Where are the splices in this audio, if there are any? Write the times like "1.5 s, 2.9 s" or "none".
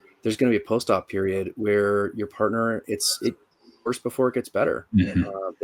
none